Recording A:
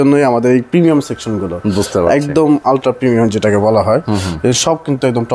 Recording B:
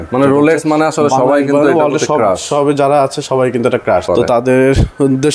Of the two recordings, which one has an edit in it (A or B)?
B